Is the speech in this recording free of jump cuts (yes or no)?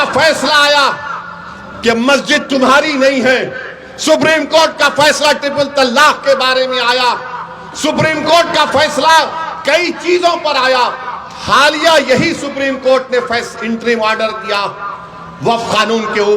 yes